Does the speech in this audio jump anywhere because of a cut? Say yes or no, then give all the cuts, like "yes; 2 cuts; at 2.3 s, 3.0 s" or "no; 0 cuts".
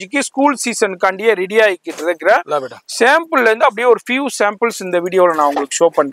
no; 0 cuts